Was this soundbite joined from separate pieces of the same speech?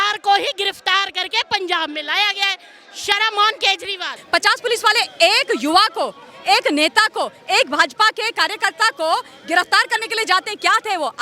yes; 1 cut; at 4.1 s

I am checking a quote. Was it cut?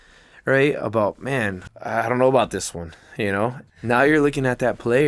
yes; 2 cuts; at 1.7 s, 3.6 s

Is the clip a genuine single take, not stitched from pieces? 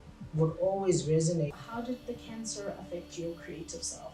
no; 1 cut; at 1.6 s

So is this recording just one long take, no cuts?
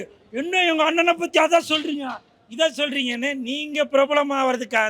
yes; 0 cuts

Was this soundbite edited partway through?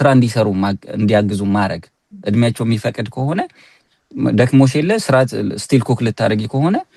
no; 0 cuts

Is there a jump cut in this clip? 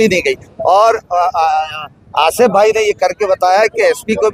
no; 0 cuts

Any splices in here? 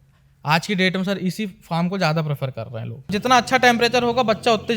yes; 1 cut; at 3.1 s

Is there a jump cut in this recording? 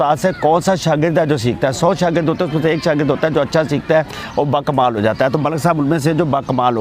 no; 0 cuts

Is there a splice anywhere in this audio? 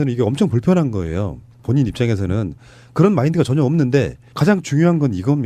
no; 0 cuts

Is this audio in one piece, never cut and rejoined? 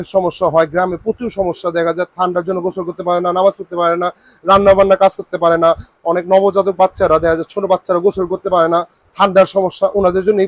yes; 0 cuts

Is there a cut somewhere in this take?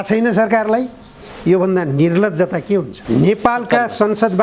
no; 0 cuts

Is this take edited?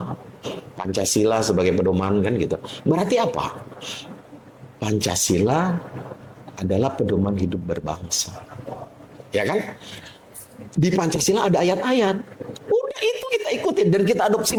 no; 0 cuts

